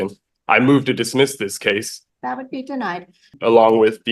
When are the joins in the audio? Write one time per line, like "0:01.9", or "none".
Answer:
0:02.0
0:03.3